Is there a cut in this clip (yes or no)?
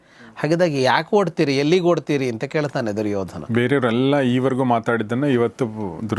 yes